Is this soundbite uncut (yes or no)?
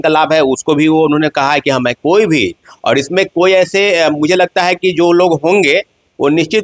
yes